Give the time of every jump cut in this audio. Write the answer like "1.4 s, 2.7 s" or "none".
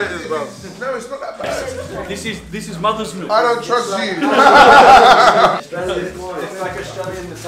1.6 s, 5.6 s